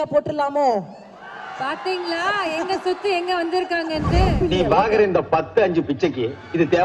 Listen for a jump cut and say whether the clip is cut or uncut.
cut